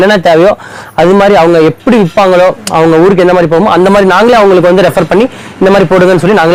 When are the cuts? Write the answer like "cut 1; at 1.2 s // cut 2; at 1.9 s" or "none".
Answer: none